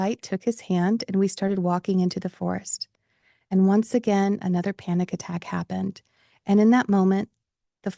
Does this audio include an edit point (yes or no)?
no